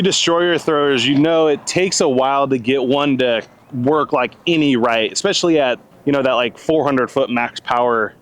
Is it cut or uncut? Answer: cut